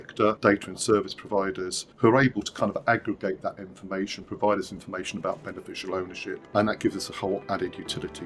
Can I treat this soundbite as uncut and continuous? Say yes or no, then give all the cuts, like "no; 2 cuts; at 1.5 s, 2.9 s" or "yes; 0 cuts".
yes; 0 cuts